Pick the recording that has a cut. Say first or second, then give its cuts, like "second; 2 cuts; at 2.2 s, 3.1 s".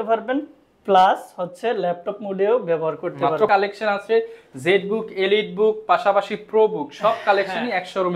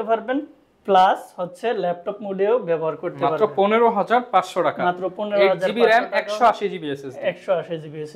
first; 1 cut; at 3.5 s